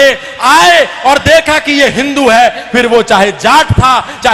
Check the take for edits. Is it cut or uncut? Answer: uncut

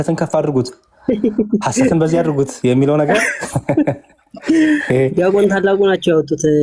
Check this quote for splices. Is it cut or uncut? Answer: uncut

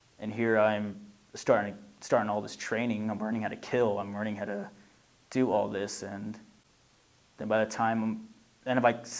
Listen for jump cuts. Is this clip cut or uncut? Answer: uncut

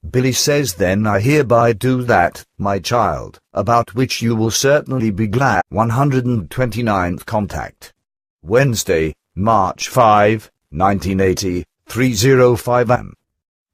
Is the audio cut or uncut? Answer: uncut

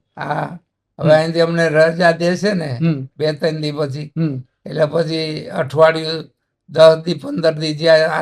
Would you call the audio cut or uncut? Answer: uncut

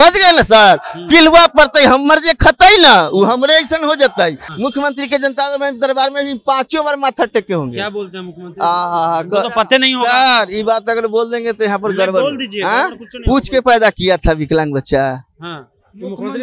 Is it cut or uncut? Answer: cut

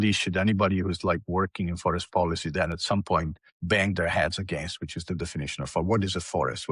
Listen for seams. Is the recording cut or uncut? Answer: uncut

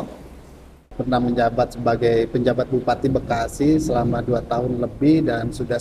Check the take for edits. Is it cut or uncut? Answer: cut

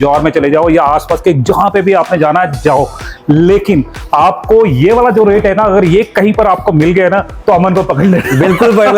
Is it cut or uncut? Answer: uncut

